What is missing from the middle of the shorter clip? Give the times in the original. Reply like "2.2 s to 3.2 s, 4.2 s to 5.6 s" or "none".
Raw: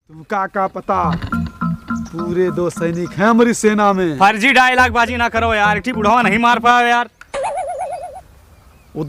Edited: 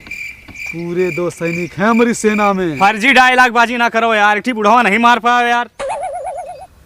7.1 s to 7.3 s